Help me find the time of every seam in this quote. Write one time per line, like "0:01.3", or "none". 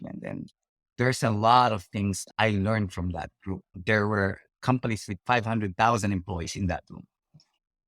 0:03.7
0:04.4

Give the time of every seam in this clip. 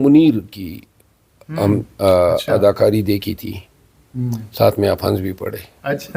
none

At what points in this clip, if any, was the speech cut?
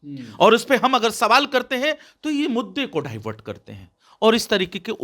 none

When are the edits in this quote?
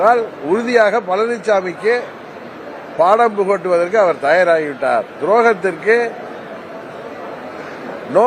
none

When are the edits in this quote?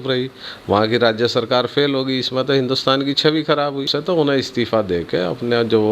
0:03.9

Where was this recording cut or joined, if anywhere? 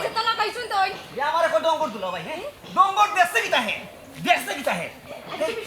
none

